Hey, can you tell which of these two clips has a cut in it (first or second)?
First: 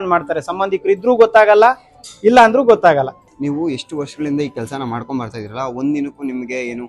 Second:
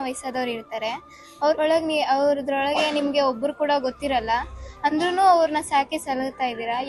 first